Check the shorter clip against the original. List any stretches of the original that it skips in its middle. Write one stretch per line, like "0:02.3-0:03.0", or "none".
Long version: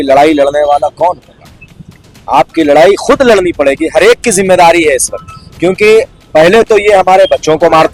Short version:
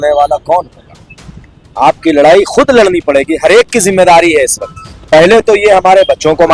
0:05.5-0:06.2